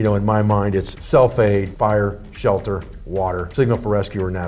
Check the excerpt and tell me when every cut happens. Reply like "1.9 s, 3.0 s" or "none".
1.0 s, 1.7 s, 3.5 s